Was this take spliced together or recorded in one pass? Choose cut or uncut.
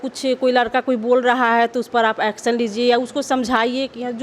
uncut